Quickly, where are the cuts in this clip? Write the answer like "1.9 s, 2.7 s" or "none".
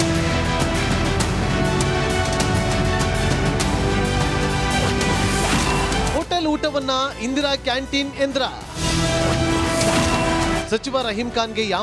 none

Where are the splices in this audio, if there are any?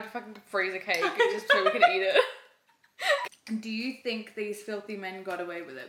3.2 s

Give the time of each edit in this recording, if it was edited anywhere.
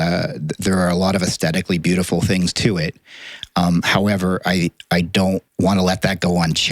5.5 s

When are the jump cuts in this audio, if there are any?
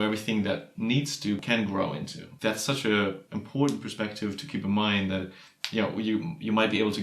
1.4 s, 2.2 s, 3.3 s

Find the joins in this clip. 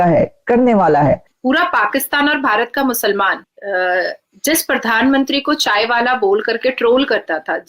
1.3 s, 3.5 s

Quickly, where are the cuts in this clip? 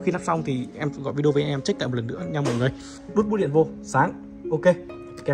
2.9 s

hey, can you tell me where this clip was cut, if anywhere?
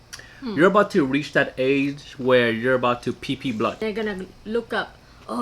3.8 s

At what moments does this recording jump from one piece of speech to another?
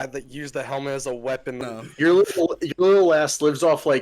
1.6 s

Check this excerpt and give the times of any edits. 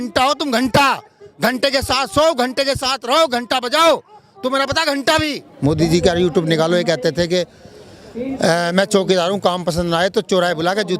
5.4 s

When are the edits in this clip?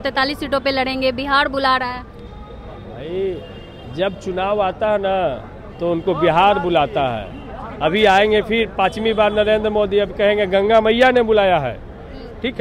none

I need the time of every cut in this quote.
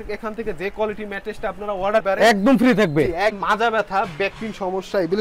3.4 s

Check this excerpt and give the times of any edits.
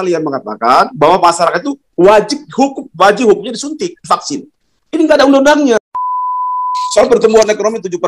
6.3 s

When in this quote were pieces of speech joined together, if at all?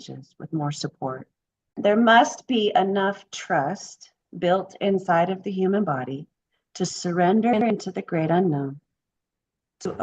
1.8 s

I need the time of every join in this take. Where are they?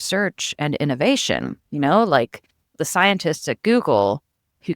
2.8 s

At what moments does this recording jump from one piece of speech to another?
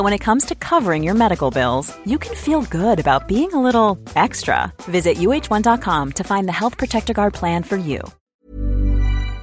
8.1 s

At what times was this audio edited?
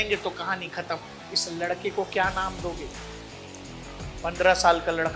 1.3 s

